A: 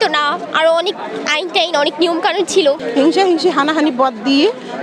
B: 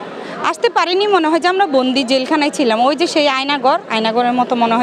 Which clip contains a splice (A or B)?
A